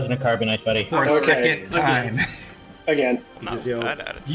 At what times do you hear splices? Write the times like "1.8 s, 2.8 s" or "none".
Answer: 3.3 s

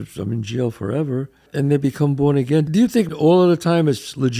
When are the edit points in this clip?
1.5 s, 3.2 s

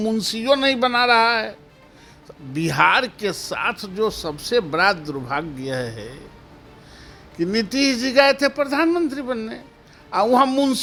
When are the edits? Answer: none

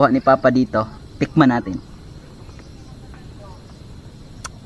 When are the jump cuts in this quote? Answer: none

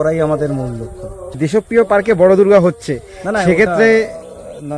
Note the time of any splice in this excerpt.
1.4 s

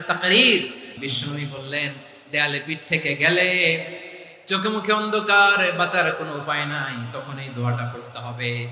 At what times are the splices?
1.1 s

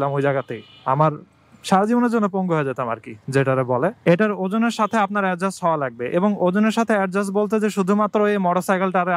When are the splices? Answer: 4.0 s

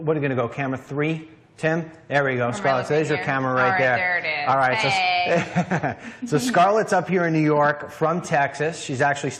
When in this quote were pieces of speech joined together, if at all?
5.6 s

